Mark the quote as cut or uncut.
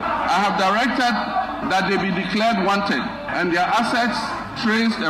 uncut